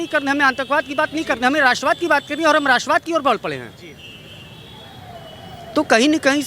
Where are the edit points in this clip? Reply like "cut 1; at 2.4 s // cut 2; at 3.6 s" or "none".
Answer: none